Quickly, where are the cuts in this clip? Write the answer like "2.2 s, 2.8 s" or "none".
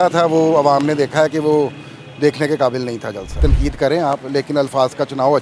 3.4 s